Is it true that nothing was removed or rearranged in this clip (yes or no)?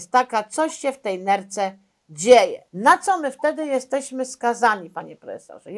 no